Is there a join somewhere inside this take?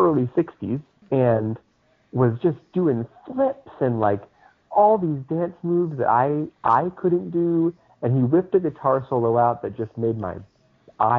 yes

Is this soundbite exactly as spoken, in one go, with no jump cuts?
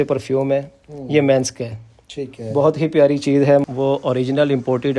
no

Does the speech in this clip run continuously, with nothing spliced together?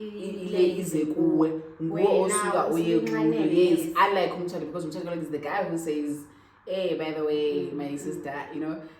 yes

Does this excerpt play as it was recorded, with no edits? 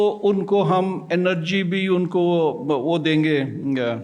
yes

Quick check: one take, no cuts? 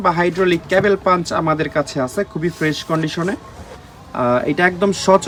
yes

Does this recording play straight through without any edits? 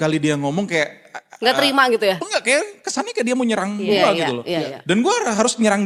yes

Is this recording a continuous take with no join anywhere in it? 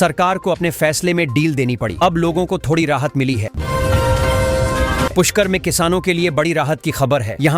no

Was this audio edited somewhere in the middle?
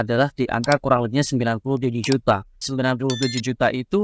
yes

